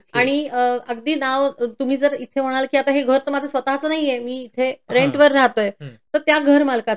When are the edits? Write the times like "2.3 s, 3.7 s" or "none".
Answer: none